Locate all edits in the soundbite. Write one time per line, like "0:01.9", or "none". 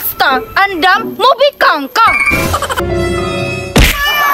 0:02.8